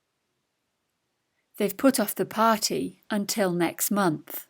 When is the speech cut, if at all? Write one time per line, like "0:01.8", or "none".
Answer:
0:01.1

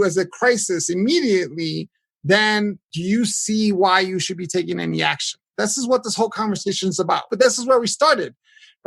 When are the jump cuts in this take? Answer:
0:02.9
0:05.4
0:07.3

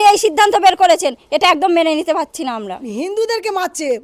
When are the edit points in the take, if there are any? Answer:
0:02.8

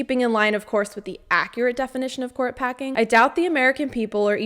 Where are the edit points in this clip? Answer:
0:02.9

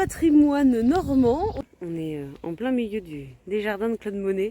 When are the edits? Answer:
0:01.6

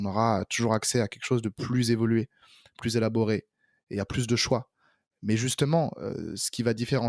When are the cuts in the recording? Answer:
none

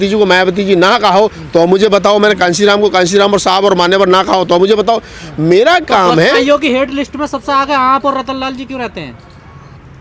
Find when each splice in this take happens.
none

